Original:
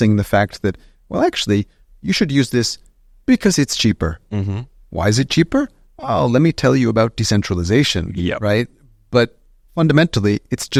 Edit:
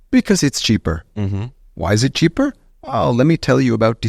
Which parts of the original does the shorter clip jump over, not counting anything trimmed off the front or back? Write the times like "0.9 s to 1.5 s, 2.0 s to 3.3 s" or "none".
none